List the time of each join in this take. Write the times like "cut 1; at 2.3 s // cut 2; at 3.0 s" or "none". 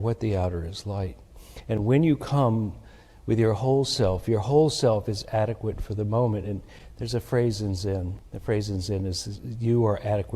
cut 1; at 8.2 s